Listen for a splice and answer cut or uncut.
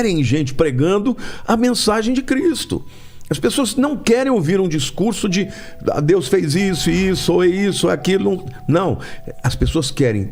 uncut